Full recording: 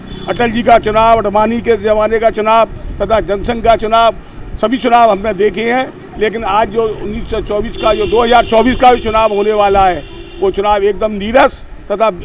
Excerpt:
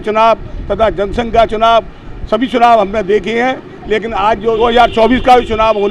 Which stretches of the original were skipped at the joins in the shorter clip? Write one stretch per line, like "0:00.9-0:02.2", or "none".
0:06.9-0:08.1